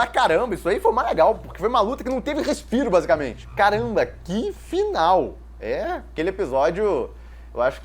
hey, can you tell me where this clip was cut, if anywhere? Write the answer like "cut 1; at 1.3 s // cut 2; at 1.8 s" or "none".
cut 1; at 3.4 s